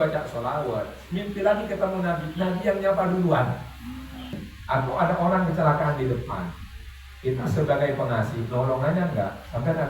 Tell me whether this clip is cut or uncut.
cut